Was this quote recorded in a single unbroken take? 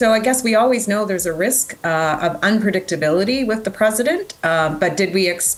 yes; 0 cuts

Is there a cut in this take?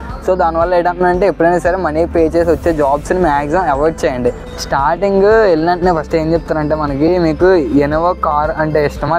yes; 1 cut; at 4.4 s

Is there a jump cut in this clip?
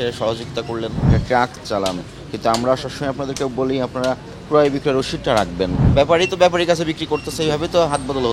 yes; 2 cuts; at 1.1 s, 5.8 s

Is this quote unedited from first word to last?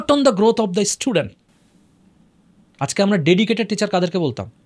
yes; 0 cuts

